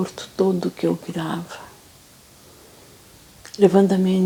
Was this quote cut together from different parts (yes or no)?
no